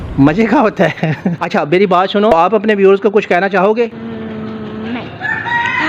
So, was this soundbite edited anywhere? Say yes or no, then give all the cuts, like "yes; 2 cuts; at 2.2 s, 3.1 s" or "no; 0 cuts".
no; 0 cuts